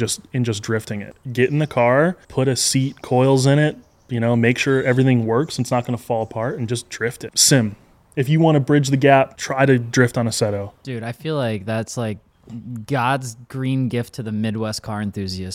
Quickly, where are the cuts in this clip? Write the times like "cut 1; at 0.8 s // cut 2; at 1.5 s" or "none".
cut 1; at 1.1 s // cut 2; at 2.2 s // cut 3; at 7.3 s // cut 4; at 9.4 s